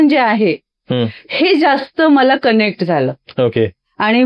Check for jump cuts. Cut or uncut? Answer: uncut